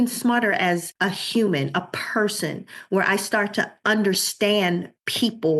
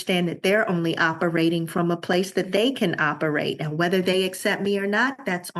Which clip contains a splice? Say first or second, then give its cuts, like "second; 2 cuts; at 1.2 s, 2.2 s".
first; 2 cuts; at 0.9 s, 3.7 s